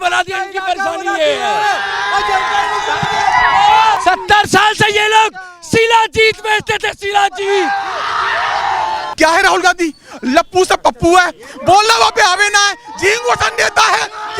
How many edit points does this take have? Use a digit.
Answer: 2